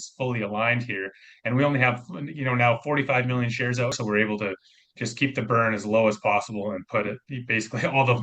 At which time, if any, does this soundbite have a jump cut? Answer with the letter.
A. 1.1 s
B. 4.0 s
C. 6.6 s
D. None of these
B